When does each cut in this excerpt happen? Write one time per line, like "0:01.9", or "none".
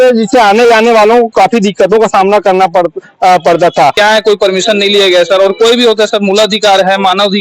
0:04.0